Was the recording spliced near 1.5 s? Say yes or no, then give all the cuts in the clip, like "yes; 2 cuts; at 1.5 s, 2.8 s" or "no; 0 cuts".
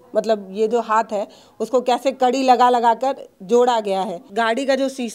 no; 1 cut; at 4.2 s